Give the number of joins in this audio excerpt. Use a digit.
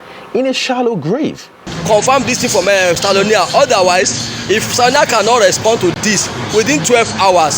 1